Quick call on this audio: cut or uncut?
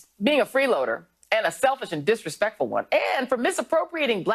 cut